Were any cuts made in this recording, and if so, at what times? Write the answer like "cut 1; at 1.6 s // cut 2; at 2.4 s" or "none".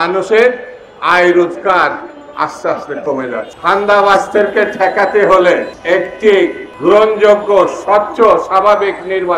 cut 1; at 3.5 s // cut 2; at 5.7 s // cut 3; at 6.7 s